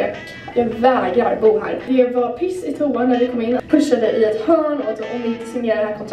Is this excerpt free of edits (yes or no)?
no